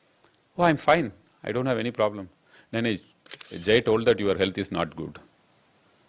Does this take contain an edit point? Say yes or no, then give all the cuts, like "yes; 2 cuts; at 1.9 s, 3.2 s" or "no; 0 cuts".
no; 0 cuts